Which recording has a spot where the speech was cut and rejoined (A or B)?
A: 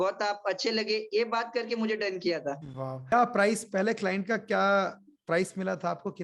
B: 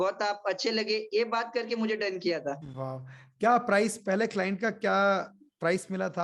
A